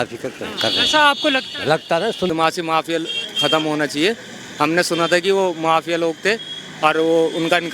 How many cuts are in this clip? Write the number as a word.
one